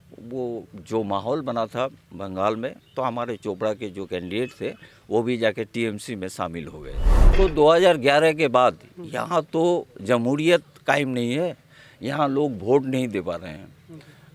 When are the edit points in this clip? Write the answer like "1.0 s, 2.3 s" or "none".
7.3 s